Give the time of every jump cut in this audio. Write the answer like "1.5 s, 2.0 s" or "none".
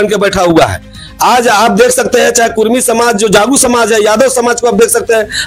none

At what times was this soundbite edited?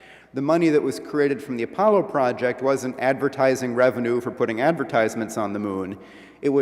4.3 s

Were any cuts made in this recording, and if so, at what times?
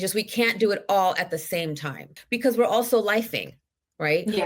2.1 s

